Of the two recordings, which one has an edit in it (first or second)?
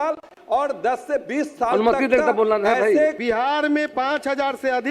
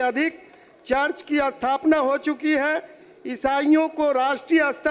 first